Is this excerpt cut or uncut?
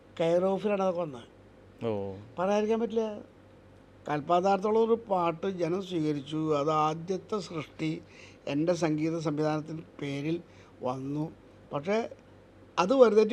uncut